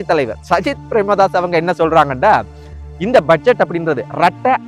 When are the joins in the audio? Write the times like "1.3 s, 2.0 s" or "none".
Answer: none